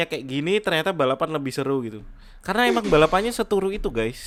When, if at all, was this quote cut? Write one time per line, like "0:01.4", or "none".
none